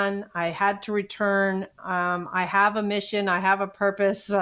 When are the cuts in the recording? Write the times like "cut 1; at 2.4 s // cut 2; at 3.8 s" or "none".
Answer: none